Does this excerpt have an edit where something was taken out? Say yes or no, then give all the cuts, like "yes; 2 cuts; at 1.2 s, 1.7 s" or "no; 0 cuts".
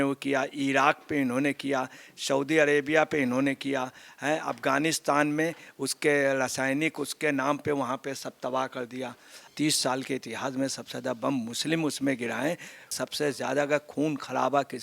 yes; 2 cuts; at 9.5 s, 13.0 s